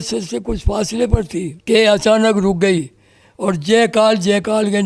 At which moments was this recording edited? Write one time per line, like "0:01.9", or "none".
0:01.6